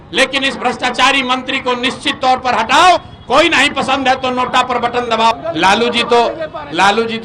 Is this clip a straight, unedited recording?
no; 1 cut; at 5.3 s

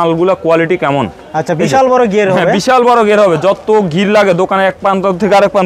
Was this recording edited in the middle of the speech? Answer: no; 0 cuts

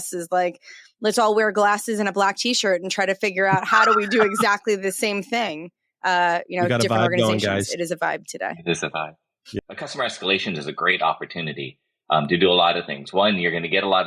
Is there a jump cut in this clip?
yes; 1 cut; at 9.6 s

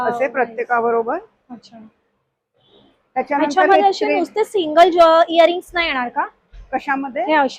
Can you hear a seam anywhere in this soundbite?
no; 0 cuts

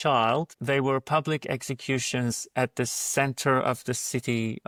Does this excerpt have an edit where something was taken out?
no; 0 cuts

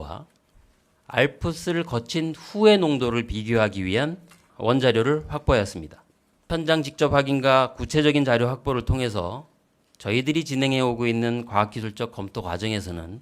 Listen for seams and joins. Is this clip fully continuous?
no; 2 cuts; at 4.4 s, 6.5 s

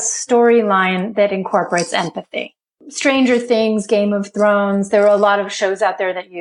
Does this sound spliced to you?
no; 0 cuts

